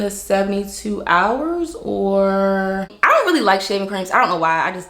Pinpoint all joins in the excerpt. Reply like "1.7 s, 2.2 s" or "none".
2.9 s